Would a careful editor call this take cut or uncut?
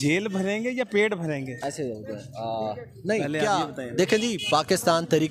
uncut